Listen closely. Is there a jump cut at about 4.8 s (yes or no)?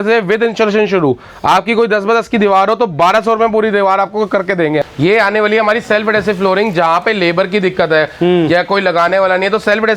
yes